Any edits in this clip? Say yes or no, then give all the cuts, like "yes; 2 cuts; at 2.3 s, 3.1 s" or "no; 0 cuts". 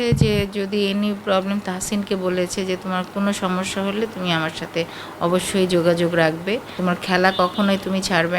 yes; 1 cut; at 6.8 s